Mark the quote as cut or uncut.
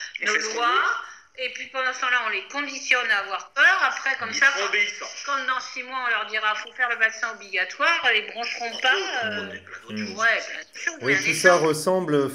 uncut